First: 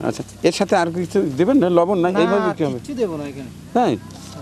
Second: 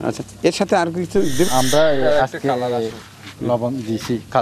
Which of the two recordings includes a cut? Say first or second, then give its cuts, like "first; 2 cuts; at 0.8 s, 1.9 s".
second; 1 cut; at 1.5 s